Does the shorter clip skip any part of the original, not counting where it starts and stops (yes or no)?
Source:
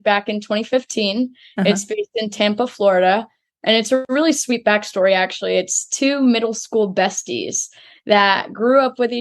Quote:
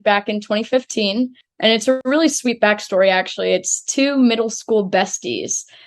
yes